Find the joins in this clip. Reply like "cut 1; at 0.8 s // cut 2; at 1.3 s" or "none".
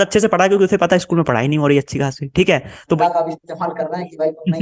cut 1; at 3.0 s